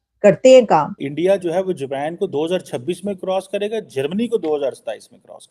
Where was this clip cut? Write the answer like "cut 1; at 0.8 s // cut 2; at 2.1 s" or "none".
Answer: cut 1; at 1.0 s